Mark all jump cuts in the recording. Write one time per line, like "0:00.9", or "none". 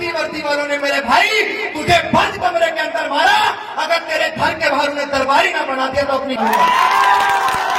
none